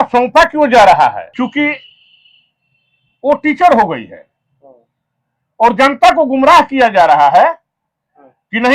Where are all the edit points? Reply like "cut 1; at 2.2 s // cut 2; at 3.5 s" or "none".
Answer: cut 1; at 1.2 s